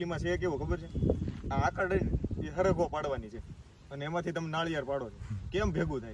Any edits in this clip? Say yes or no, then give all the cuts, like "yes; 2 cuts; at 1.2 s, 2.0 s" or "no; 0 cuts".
no; 0 cuts